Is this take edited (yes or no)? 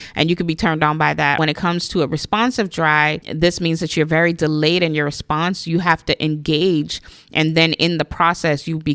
yes